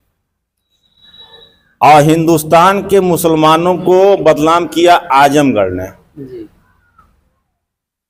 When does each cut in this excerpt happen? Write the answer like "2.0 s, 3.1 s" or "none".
none